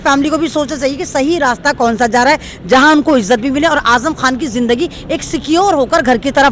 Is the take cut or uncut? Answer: uncut